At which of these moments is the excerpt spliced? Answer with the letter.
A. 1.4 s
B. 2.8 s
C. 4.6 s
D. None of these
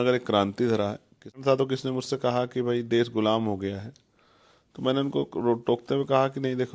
A